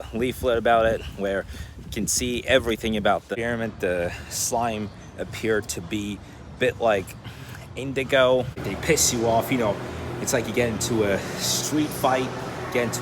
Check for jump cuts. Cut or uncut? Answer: cut